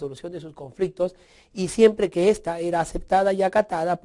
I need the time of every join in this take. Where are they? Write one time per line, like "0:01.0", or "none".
0:01.2